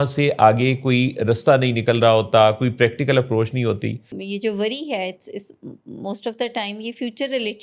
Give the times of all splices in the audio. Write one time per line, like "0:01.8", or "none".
0:04.1